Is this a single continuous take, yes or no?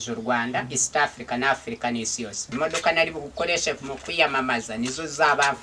no